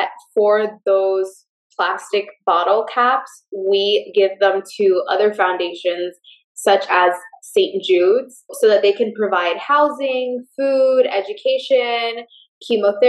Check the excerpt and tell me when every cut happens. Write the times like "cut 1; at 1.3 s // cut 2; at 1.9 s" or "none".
cut 1; at 8.5 s